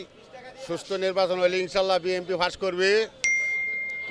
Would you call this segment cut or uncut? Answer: uncut